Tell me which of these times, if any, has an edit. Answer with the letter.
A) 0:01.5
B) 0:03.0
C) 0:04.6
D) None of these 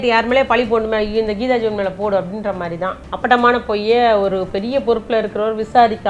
B